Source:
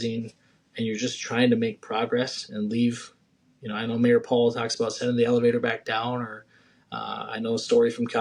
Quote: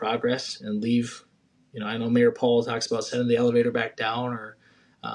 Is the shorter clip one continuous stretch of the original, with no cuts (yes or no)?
yes